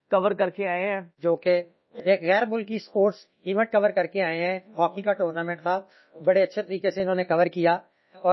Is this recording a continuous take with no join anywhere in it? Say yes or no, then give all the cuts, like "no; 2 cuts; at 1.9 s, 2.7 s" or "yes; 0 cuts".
no; 1 cut; at 1.2 s